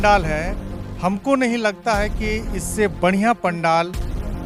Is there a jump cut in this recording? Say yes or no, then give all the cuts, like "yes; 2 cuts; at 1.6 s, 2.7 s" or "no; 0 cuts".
no; 0 cuts